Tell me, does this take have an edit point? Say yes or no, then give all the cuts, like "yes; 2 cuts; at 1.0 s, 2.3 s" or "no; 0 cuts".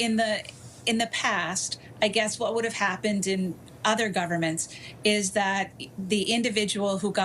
no; 0 cuts